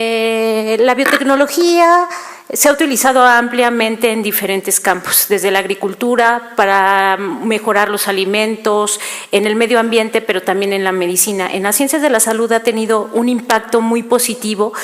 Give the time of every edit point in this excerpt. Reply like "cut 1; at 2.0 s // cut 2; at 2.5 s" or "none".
cut 1; at 12.0 s